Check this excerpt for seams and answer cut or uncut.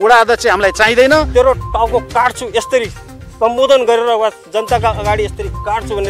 cut